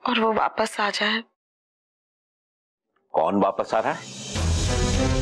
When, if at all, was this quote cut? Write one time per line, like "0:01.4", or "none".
none